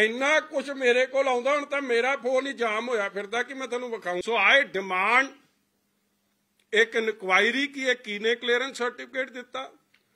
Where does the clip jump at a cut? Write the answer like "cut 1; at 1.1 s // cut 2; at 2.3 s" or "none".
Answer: cut 1; at 4.2 s